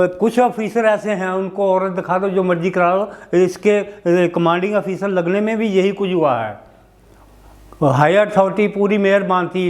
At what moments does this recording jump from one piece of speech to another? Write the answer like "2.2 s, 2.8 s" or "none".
none